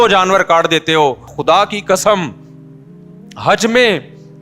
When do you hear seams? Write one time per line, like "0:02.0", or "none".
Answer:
0:01.4